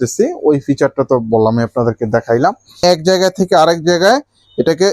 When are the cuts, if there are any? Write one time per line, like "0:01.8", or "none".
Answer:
0:02.8

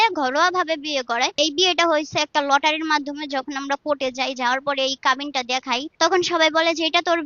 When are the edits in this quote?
0:01.4
0:05.9

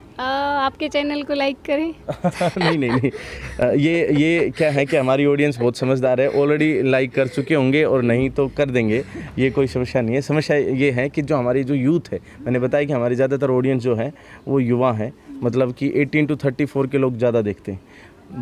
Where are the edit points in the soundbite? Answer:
none

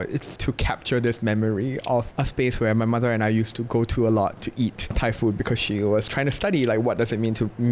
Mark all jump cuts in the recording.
none

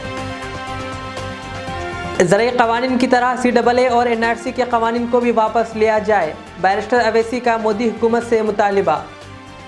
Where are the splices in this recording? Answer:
0:02.0

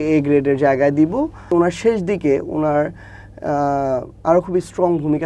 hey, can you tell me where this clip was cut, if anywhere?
0:01.5

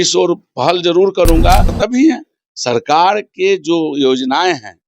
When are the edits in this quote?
0:01.7

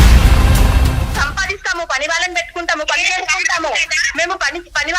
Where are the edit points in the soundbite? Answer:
0:01.1

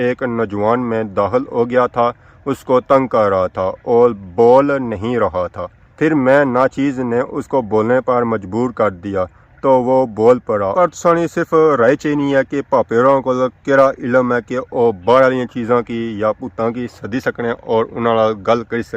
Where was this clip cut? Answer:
0:10.7

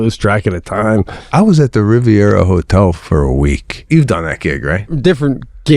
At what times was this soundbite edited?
0:01.2
0:03.9
0:04.9

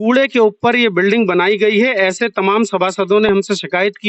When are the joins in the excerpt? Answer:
none

